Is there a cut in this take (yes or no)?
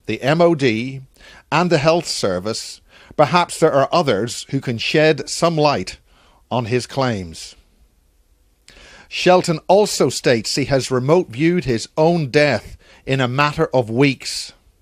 no